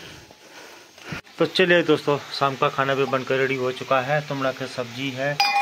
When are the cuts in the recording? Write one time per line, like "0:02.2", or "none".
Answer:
0:01.2